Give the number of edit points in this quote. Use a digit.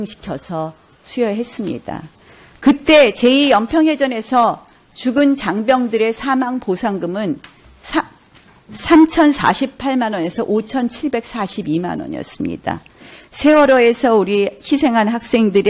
1